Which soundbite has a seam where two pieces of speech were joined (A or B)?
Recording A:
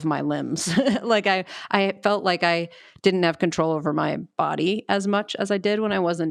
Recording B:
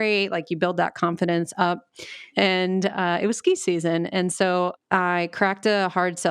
B